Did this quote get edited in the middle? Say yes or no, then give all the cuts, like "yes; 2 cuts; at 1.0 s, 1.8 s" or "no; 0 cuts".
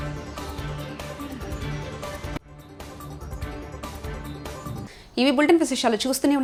no; 0 cuts